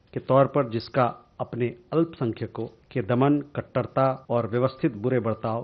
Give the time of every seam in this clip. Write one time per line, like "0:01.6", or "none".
0:02.8
0:04.2